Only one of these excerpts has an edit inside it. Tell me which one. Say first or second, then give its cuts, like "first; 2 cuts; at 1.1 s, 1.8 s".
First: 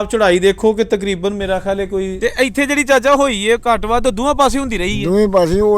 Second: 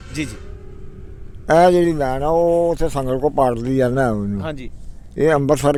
first; 1 cut; at 2.2 s